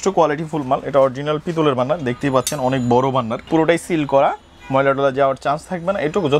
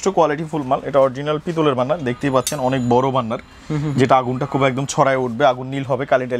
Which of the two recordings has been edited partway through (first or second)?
first